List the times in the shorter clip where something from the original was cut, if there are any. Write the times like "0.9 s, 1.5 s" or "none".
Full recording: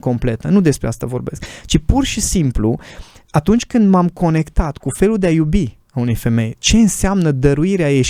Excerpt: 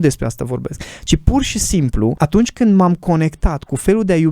2.2 s